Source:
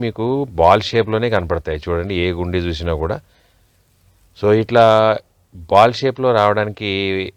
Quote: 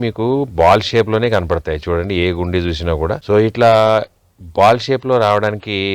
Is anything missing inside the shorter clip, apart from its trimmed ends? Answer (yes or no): yes